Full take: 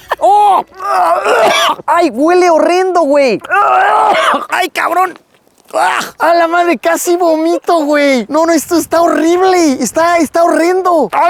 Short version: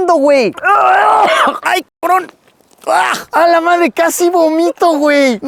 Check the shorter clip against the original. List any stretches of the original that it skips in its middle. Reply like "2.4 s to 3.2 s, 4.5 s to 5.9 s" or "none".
none